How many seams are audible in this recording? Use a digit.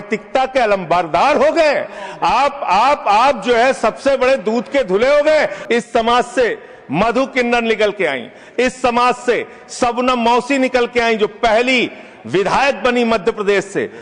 1